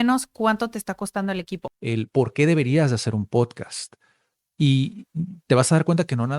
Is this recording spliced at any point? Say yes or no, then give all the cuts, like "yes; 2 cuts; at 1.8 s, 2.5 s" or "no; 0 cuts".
yes; 1 cut; at 1.6 s